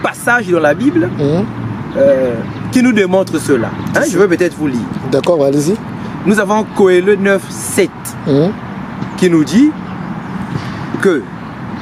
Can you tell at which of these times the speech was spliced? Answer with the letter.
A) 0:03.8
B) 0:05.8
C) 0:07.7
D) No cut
D